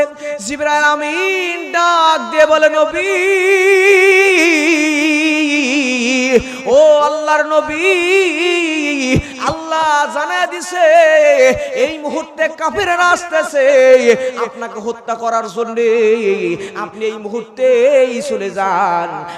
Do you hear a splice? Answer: no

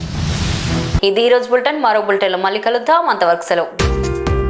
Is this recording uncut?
yes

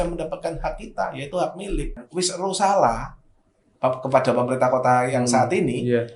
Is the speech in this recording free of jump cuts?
no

